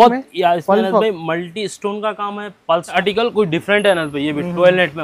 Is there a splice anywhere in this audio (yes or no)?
yes